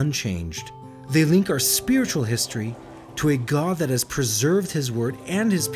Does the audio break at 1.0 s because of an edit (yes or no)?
no